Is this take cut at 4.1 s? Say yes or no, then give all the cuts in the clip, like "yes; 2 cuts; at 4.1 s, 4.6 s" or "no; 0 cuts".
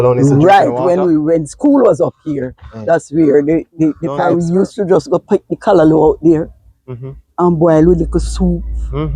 yes; 1 cut; at 4.1 s